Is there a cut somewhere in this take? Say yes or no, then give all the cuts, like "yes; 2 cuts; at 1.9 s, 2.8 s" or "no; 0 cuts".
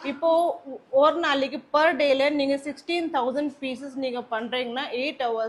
no; 0 cuts